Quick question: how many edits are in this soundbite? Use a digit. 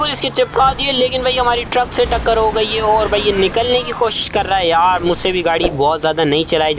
0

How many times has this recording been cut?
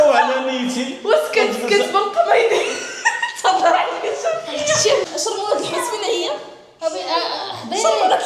1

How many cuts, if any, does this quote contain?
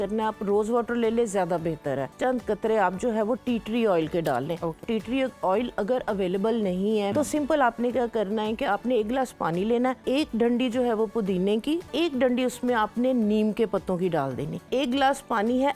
6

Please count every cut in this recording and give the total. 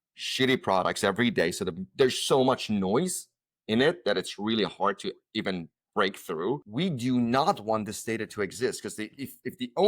1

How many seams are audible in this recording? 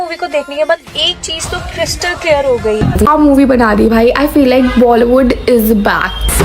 1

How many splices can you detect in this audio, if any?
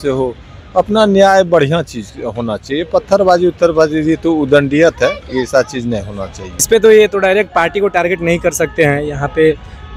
1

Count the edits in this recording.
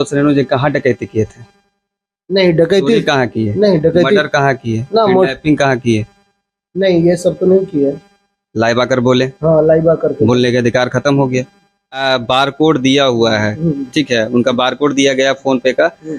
1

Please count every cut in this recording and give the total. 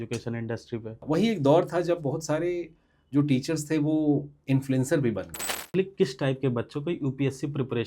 2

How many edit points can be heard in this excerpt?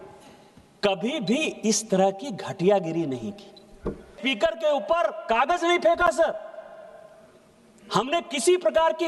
1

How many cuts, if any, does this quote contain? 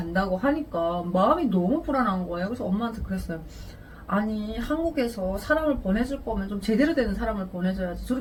0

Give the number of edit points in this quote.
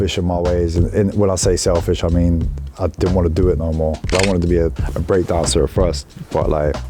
1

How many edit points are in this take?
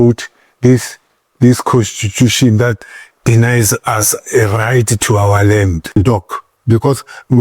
1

